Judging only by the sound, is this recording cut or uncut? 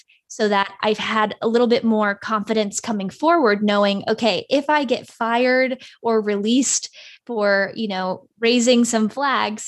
uncut